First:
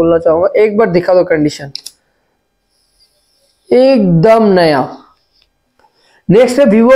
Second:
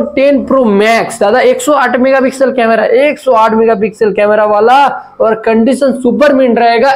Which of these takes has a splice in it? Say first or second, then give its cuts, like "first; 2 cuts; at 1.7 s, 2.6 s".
first; 1 cut; at 5.6 s